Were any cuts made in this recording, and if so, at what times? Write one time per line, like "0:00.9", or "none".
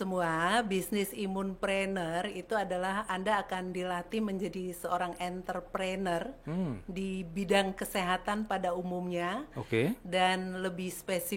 none